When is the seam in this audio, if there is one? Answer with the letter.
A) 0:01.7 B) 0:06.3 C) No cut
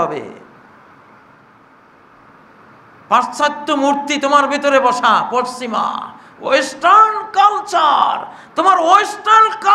A